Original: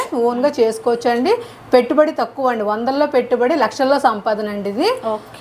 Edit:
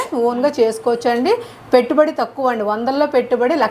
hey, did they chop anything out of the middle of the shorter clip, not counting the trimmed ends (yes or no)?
no